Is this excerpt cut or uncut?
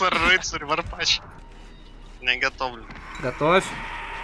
cut